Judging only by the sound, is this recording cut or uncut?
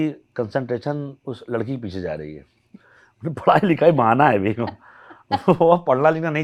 uncut